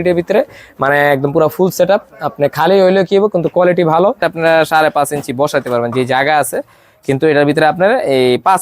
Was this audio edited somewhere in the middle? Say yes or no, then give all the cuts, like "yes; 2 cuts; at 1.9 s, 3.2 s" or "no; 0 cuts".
yes; 1 cut; at 4.2 s